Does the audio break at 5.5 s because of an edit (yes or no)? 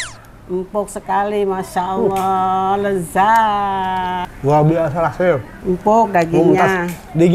yes